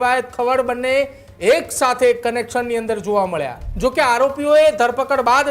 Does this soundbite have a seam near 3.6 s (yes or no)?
yes